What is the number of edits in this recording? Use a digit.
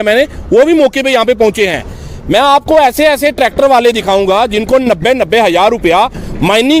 0